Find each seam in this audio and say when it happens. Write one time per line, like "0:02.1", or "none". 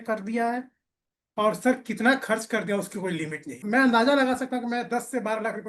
0:03.6